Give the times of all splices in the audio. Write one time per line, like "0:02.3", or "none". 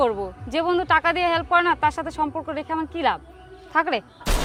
none